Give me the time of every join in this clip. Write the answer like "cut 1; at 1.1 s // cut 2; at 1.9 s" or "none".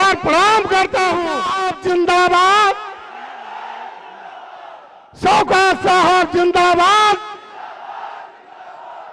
cut 1; at 1.5 s